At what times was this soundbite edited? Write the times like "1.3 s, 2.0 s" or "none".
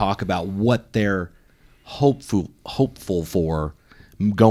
none